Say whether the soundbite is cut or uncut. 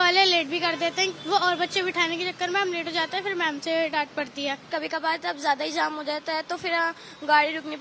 cut